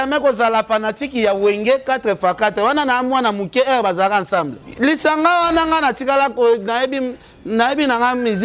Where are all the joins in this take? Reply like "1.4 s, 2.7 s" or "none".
4.6 s